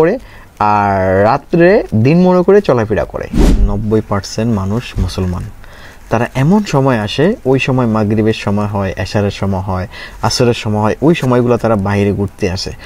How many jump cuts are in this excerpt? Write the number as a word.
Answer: one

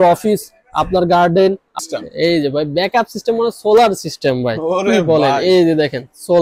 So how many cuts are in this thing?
one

